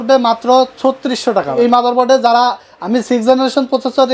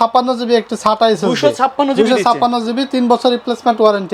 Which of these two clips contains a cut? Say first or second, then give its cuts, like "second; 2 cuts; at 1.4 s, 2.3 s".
first; 1 cut; at 1.5 s